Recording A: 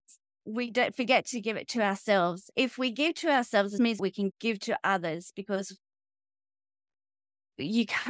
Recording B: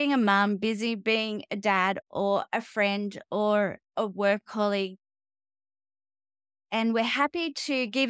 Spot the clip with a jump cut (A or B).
A